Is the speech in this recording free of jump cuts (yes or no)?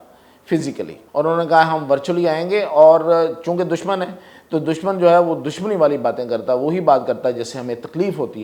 no